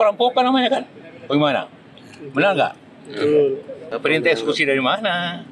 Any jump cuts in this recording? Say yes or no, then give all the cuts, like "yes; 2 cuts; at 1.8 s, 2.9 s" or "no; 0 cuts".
yes; 1 cut; at 3.9 s